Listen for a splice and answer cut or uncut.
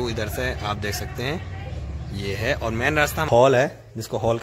cut